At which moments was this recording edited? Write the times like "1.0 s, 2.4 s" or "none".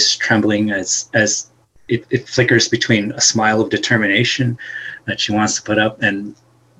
none